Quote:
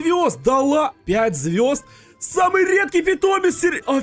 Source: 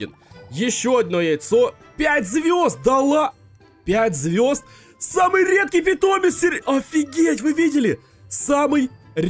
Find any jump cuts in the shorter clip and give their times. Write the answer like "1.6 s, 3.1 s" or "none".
1.0 s